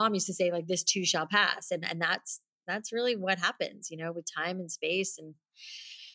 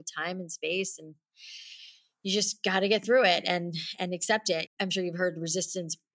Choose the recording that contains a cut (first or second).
second